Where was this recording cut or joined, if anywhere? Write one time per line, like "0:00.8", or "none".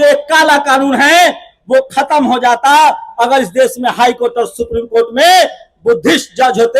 none